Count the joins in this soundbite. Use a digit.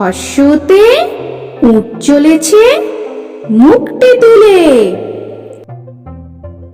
1